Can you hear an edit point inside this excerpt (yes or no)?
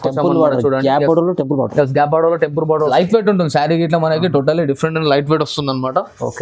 yes